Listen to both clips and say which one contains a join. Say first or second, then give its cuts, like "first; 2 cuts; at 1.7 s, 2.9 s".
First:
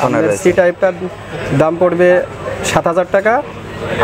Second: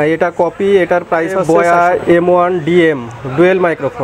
second; 1 cut; at 1.4 s